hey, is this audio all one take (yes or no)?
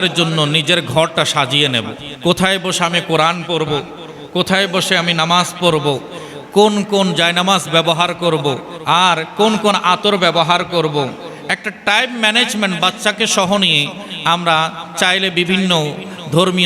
no